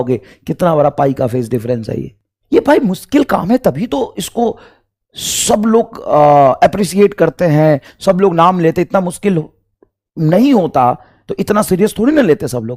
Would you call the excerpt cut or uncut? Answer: uncut